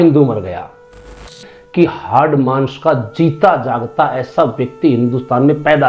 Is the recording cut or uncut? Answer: cut